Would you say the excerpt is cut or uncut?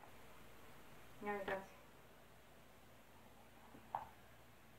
cut